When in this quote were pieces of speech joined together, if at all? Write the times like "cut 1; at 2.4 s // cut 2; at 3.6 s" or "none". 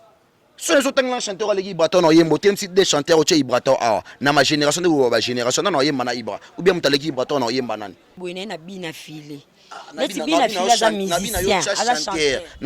cut 1; at 8.2 s